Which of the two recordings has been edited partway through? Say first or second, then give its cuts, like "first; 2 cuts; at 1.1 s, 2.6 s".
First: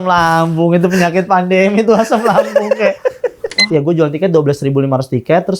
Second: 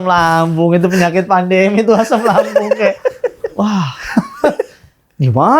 first; 1 cut; at 3.5 s